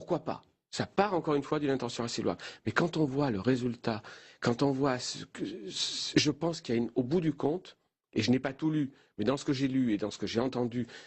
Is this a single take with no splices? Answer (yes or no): no